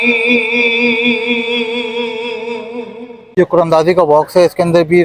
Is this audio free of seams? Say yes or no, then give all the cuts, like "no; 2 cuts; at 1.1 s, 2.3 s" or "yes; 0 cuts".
no; 1 cut; at 3.2 s